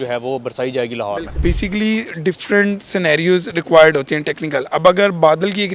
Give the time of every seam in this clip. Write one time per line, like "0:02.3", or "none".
0:01.3